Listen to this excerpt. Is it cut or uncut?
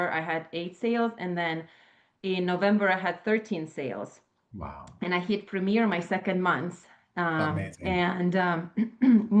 uncut